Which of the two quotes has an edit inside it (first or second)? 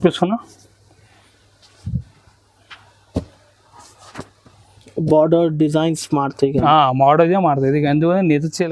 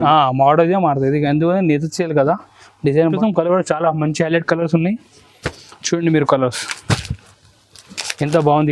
second